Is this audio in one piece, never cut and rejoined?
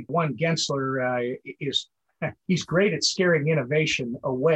yes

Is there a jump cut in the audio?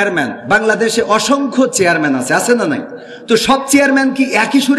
no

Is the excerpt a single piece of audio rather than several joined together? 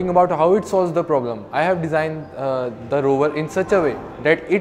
yes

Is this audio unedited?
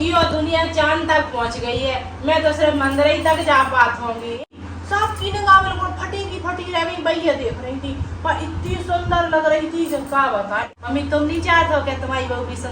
no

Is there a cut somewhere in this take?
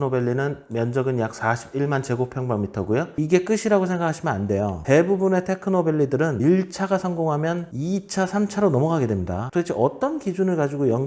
yes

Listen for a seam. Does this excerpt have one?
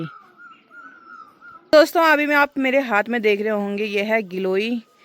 yes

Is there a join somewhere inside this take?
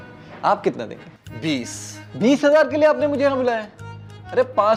no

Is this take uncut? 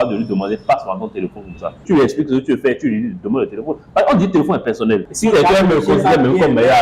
no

